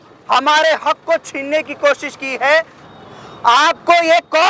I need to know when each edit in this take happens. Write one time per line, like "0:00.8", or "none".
0:02.8